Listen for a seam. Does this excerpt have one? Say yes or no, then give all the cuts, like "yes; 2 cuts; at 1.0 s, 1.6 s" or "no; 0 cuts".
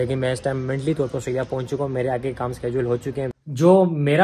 yes; 1 cut; at 3.3 s